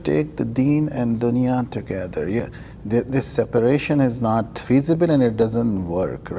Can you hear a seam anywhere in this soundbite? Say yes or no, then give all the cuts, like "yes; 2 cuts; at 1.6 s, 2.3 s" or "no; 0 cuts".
no; 0 cuts